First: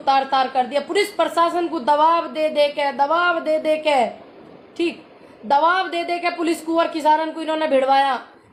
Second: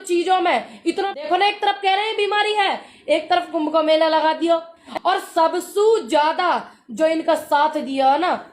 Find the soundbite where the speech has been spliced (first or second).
second